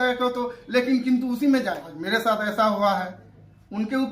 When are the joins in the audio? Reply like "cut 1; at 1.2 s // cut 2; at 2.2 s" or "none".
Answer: cut 1; at 1.9 s